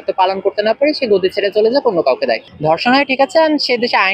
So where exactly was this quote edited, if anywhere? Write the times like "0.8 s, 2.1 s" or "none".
2.4 s